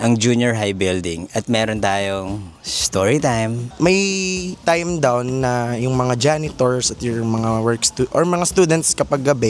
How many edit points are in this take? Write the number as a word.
one